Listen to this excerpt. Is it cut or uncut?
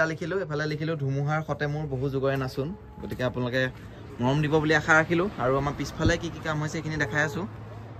uncut